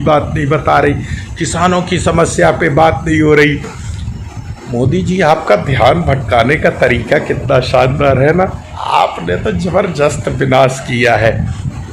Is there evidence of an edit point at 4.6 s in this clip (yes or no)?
no